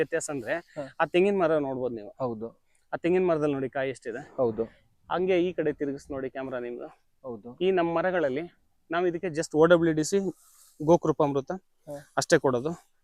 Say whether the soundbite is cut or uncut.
uncut